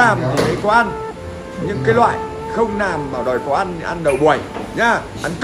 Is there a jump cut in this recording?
no; 0 cuts

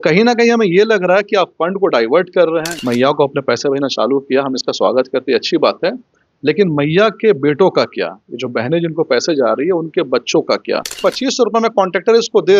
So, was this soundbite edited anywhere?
yes; 2 cuts; at 2.7 s, 11.0 s

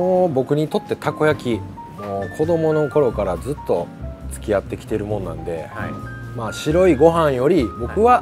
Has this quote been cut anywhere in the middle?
no; 0 cuts

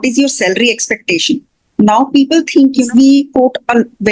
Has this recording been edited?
yes; 1 cut; at 2.9 s

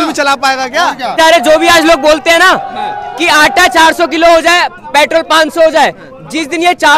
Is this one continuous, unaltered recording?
no; 1 cut; at 1.1 s

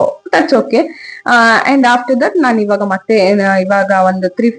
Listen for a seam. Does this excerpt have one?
no; 0 cuts

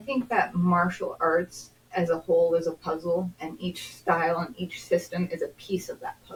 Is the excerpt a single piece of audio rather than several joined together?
yes; 0 cuts

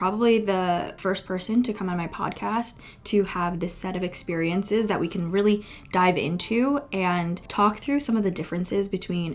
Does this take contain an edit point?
yes; 2 cuts; at 0.9 s, 7.4 s

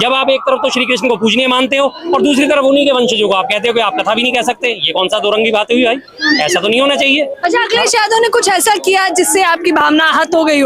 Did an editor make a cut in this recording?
no; 0 cuts

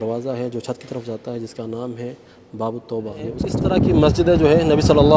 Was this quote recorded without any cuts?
no; 1 cut; at 3.4 s

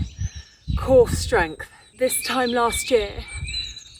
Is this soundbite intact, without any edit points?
no; 1 cut; at 1.8 s

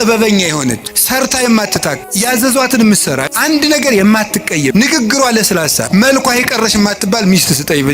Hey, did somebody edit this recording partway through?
yes; 5 cuts; at 0.9 s, 2.0 s, 3.3 s, 4.7 s, 5.9 s

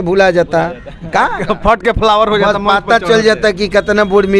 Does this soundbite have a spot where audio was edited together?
no; 0 cuts

